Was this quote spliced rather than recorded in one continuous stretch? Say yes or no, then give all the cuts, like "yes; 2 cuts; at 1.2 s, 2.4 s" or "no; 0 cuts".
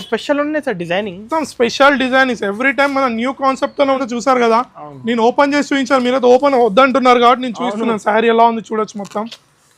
yes; 1 cut; at 4.0 s